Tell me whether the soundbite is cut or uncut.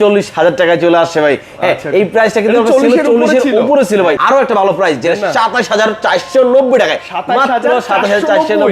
cut